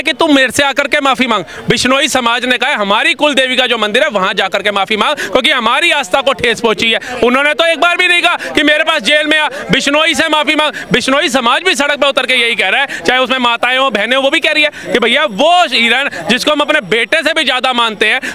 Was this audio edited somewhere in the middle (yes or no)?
no